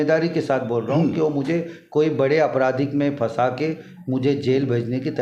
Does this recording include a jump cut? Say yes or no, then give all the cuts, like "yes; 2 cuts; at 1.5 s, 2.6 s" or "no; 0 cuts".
no; 0 cuts